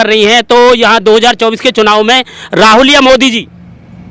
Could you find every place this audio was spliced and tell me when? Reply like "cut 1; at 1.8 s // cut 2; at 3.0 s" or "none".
none